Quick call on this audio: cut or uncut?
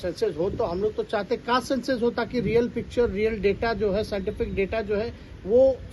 uncut